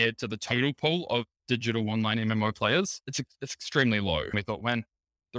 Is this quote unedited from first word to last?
no; 1 cut; at 4.3 s

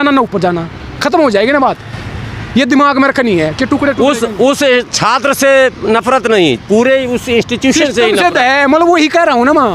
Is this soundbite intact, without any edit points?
yes; 0 cuts

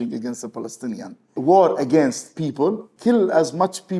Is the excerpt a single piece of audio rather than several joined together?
no; 2 cuts; at 1.3 s, 2.9 s

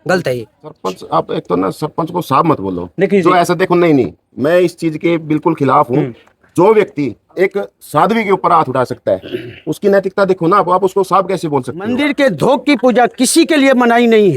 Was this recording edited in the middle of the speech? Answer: yes; 2 cuts; at 0.9 s, 11.9 s

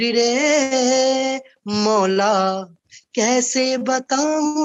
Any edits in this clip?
no; 0 cuts

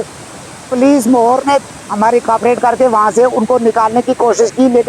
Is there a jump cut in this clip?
no; 0 cuts

